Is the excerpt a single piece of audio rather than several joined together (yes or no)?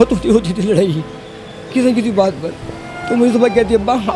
yes